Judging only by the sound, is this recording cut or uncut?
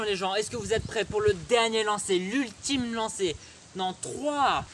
uncut